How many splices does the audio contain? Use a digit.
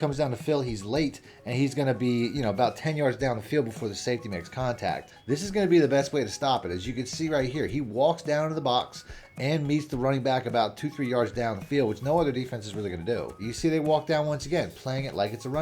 2